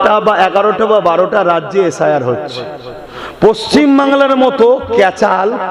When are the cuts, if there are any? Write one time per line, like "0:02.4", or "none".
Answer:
none